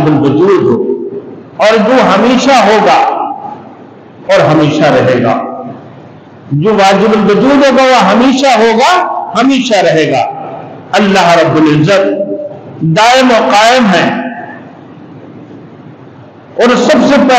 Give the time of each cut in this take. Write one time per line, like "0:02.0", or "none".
none